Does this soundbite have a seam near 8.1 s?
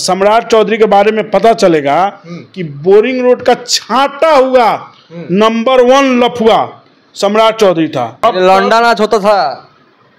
yes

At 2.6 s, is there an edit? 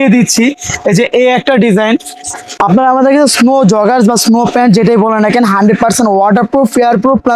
yes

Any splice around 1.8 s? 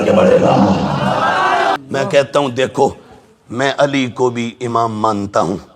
yes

